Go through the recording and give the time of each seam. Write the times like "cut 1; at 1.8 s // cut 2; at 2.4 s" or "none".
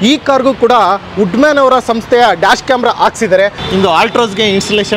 cut 1; at 3.6 s